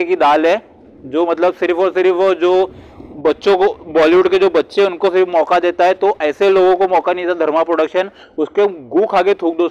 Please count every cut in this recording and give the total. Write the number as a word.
zero